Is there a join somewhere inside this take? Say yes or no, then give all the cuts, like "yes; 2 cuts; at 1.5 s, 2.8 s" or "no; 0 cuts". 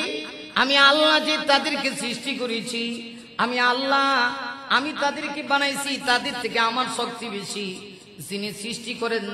no; 0 cuts